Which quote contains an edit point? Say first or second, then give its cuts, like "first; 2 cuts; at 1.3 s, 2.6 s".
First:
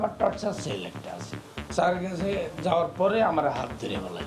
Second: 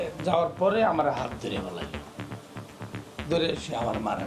first; 1 cut; at 1.4 s